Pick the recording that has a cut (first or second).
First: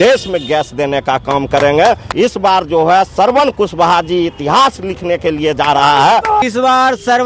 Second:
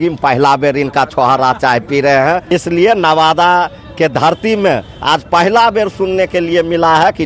first